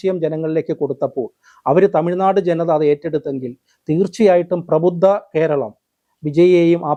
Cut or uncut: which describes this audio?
uncut